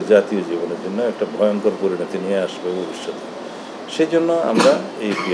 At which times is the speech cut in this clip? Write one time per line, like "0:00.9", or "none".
none